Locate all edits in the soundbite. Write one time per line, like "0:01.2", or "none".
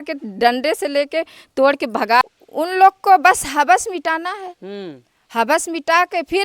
0:02.2